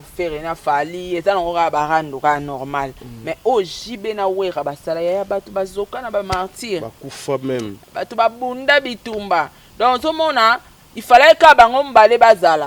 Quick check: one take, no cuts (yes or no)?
yes